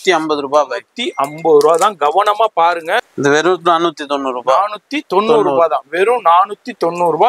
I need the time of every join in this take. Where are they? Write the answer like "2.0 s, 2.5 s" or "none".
3.1 s